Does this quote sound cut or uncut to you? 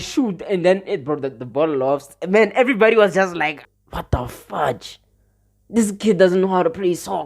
cut